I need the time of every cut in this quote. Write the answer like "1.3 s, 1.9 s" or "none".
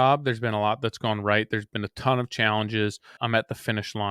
3.2 s